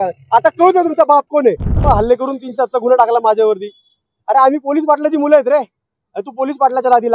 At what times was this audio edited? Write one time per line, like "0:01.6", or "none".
0:01.8